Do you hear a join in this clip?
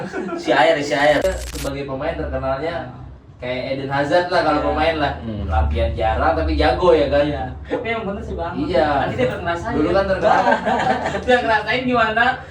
yes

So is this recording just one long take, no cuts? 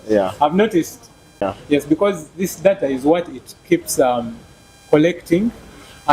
no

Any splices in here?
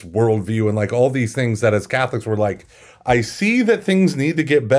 no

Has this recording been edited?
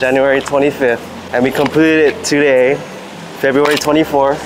yes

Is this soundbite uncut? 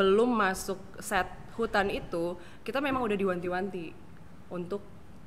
yes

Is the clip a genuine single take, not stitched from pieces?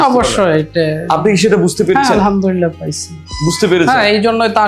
yes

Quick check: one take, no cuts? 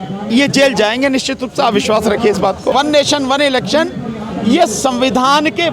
no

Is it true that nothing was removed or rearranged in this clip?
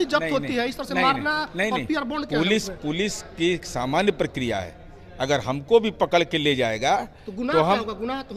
yes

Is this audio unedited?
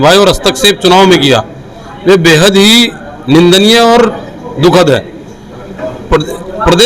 yes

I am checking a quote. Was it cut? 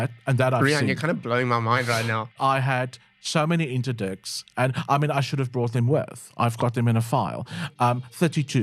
yes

